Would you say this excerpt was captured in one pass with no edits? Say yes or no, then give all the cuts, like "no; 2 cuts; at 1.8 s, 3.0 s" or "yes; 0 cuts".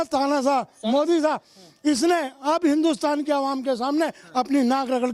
yes; 0 cuts